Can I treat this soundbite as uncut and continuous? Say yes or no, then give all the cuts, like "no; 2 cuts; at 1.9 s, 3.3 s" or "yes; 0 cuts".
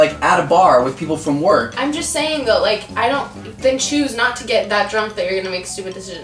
yes; 0 cuts